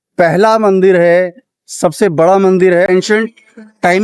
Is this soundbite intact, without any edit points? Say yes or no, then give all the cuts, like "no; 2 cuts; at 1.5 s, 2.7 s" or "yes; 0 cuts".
no; 1 cut; at 2.9 s